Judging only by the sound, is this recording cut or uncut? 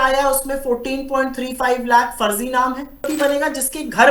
cut